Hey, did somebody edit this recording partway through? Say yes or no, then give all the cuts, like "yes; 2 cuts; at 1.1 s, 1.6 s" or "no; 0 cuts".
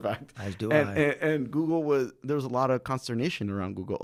no; 0 cuts